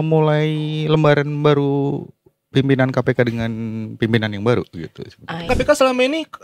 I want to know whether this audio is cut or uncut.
cut